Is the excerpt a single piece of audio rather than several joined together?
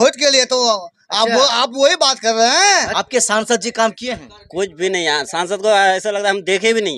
no; 1 cut; at 2.9 s

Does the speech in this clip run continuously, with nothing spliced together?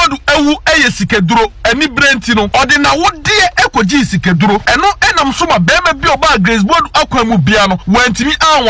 no; 3 cuts; at 2.5 s, 4.6 s, 7.8 s

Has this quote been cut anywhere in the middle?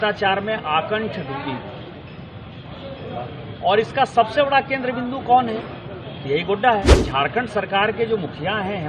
yes; 1 cut; at 7.0 s

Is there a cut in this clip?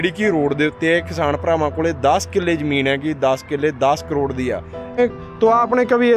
yes; 1 cut; at 5.0 s

